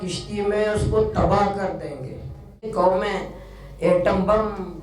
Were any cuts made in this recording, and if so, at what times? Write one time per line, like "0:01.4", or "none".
0:02.7